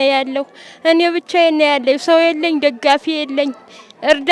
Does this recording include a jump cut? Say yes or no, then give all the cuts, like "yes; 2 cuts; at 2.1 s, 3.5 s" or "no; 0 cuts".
no; 0 cuts